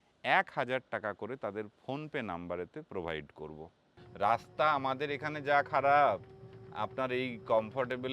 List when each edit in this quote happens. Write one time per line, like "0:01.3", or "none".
0:03.8

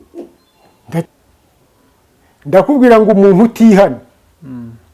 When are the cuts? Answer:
0:01.1

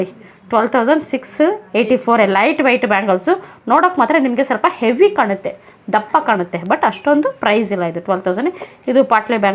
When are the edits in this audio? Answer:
none

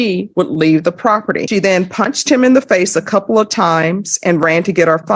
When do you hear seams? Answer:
0:01.5

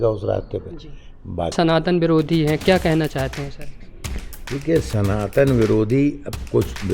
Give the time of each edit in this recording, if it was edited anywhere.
0:01.5

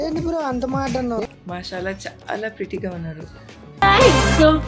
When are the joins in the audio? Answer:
0:01.3

